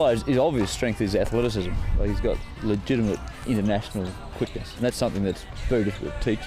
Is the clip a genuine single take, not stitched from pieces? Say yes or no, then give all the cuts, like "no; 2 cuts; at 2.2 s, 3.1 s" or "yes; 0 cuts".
no; 4 cuts; at 2.5 s, 3.3 s, 4.7 s, 5.5 s